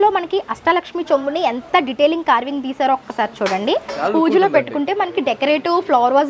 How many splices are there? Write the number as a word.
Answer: one